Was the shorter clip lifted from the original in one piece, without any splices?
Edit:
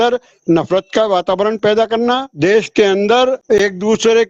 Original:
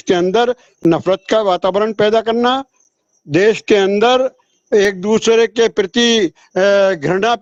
no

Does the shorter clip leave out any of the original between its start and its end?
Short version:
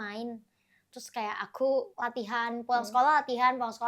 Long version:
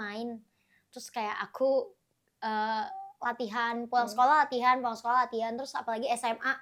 yes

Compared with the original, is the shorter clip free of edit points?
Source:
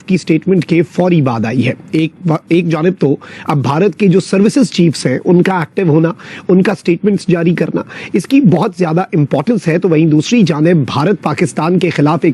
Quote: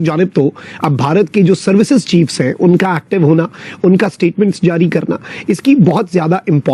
yes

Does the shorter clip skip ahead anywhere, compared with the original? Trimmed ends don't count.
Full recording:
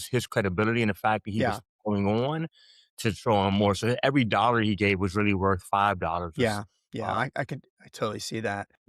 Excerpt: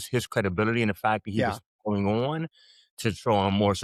no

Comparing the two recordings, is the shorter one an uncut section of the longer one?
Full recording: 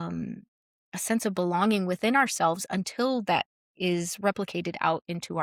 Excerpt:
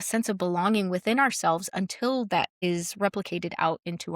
no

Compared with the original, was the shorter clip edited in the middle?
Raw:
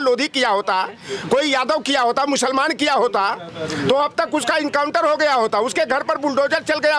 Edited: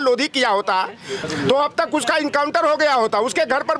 yes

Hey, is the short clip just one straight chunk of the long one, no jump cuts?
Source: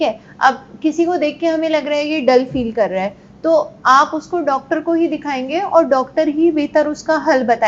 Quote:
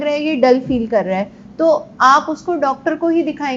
yes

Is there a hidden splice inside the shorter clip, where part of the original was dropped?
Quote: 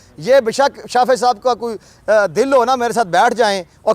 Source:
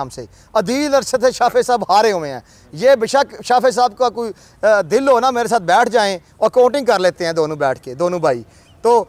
no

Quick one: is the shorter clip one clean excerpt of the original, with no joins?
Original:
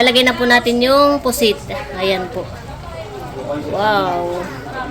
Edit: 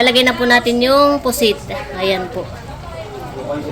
yes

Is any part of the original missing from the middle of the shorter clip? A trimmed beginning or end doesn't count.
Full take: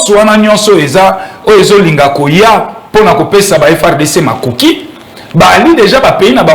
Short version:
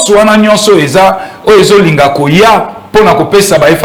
no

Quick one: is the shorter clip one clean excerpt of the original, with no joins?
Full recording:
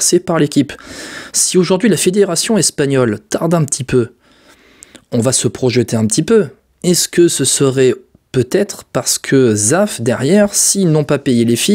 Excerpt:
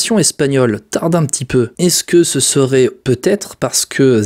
no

